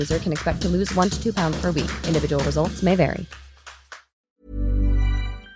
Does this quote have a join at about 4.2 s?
yes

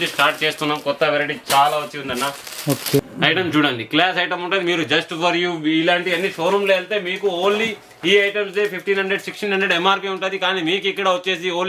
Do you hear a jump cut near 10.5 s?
no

